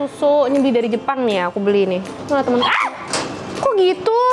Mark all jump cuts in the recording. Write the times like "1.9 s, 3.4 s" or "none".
2.2 s